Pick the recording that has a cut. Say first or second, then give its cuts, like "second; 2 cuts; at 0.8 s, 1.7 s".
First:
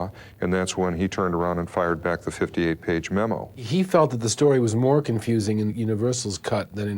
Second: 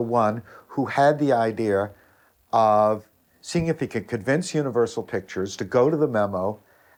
first; 2 cuts; at 3.6 s, 5.7 s